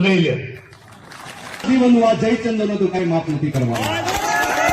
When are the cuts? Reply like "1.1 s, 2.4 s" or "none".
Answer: 1.6 s